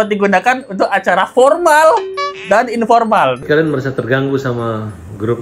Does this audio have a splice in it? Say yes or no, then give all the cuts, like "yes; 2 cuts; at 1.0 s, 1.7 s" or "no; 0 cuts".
yes; 1 cut; at 3.4 s